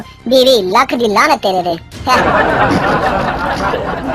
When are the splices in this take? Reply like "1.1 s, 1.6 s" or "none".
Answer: 2.2 s